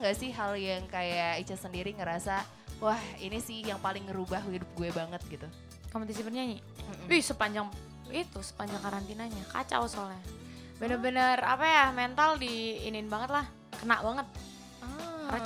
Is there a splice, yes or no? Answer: no